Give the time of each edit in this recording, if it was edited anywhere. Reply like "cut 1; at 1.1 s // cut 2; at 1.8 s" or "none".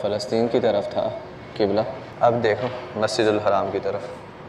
none